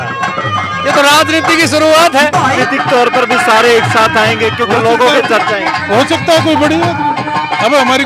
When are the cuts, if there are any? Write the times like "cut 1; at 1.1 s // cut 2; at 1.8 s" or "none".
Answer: cut 1; at 2.6 s